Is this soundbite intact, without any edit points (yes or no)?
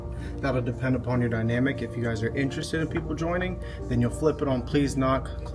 yes